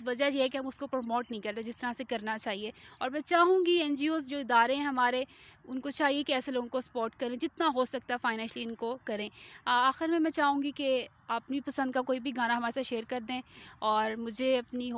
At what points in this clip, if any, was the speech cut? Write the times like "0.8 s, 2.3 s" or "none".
none